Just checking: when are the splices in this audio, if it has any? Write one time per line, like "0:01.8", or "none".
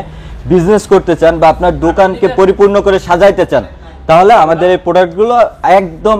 none